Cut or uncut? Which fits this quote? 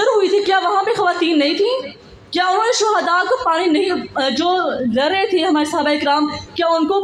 uncut